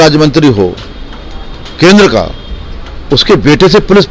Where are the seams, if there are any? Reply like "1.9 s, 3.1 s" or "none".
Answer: none